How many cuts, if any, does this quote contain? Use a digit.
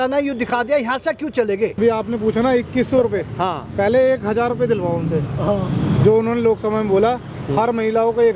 1